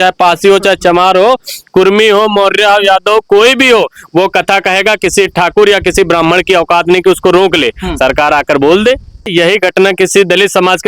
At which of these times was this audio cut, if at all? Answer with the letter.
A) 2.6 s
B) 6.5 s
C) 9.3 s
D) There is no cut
C